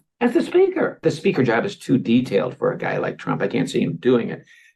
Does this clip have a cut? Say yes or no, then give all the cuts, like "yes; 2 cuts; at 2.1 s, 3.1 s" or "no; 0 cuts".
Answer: no; 0 cuts